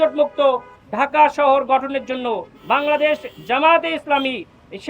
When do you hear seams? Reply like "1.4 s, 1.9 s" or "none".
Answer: 2.5 s